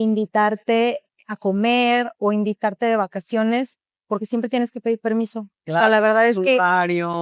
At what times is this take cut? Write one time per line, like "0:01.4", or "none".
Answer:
none